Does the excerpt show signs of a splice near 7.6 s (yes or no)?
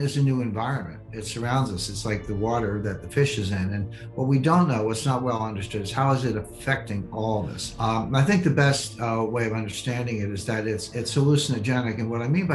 yes